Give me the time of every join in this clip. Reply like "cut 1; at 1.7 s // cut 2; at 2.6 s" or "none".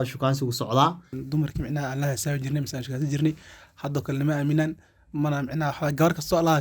cut 1; at 1.2 s